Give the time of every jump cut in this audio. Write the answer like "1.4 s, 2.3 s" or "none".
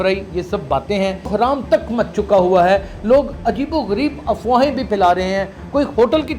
1.3 s